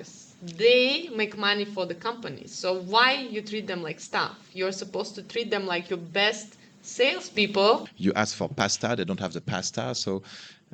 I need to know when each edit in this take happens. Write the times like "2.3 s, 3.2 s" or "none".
7.9 s